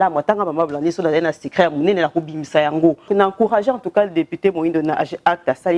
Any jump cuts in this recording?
yes; 1 cut; at 3.1 s

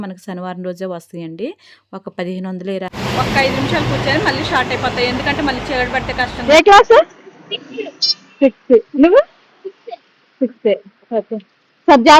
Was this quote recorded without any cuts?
no; 2 cuts; at 3.0 s, 6.4 s

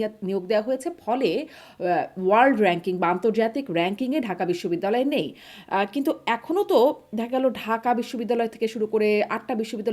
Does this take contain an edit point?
no; 0 cuts

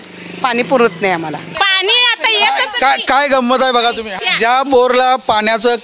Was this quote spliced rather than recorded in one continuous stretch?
yes; 2 cuts; at 1.5 s, 4.1 s

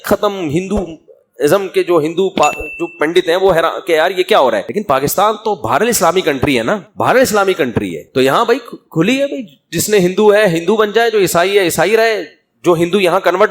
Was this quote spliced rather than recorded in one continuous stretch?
yes; 2 cuts; at 4.7 s, 6.9 s

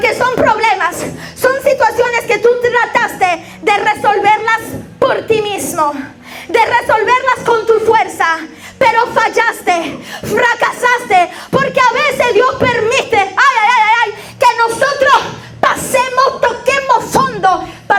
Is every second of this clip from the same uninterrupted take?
yes; 0 cuts

